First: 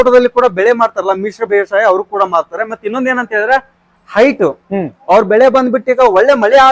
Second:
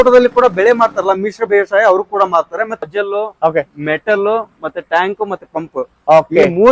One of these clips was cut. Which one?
second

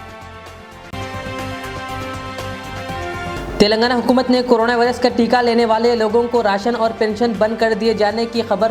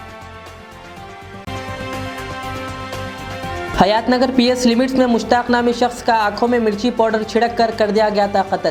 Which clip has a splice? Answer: first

